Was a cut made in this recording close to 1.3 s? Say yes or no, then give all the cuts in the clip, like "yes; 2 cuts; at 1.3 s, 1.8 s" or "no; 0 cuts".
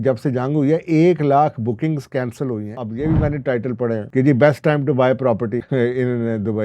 no; 3 cuts; at 2.8 s, 4.1 s, 5.7 s